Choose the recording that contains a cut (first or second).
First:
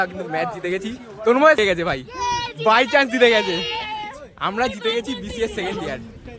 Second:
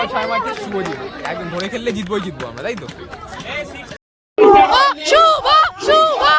first